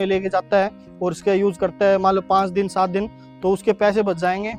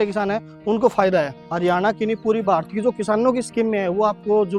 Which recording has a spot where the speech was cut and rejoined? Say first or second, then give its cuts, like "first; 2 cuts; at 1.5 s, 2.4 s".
second; 1 cut; at 1.4 s